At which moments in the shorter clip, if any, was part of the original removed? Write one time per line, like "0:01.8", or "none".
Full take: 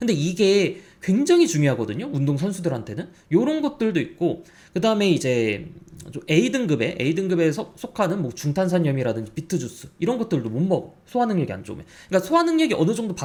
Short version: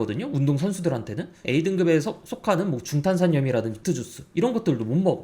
0:01.4
0:03.7